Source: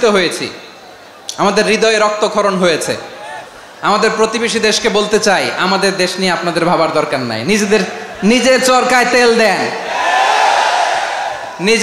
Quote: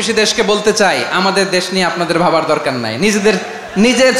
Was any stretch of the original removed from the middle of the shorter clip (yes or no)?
no